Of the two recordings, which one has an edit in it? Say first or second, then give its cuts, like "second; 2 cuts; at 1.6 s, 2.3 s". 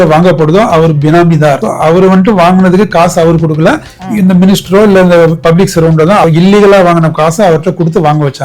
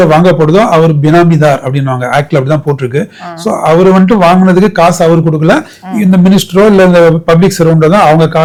first; 2 cuts; at 1.6 s, 6.2 s